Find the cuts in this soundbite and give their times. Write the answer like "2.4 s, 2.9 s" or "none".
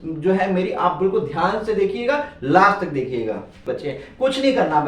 3.7 s